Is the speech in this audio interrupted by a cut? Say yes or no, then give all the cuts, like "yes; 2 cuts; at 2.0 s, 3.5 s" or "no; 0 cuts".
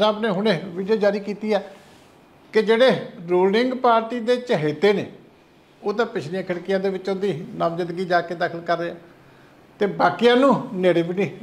no; 0 cuts